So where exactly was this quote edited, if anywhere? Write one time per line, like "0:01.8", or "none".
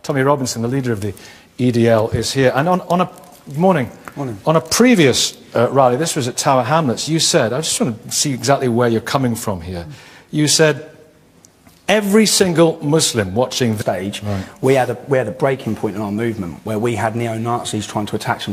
none